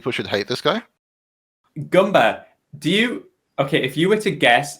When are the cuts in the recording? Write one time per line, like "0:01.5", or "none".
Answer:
0:01.0